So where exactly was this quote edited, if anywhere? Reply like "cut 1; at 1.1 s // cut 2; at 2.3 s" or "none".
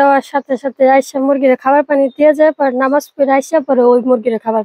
none